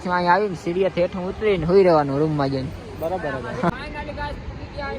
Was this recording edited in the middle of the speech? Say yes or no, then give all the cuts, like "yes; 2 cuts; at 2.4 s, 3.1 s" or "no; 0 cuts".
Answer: yes; 1 cut; at 3.7 s